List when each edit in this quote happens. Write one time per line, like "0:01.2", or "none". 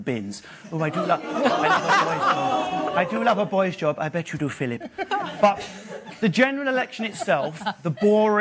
none